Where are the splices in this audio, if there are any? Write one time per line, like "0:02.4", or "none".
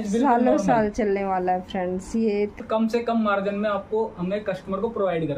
0:02.6